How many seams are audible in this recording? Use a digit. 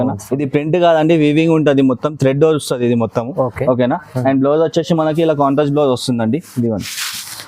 1